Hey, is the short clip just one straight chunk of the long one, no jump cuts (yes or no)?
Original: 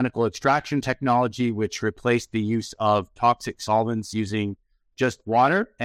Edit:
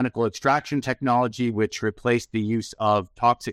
yes